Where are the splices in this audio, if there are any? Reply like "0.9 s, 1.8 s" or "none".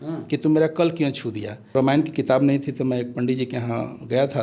1.7 s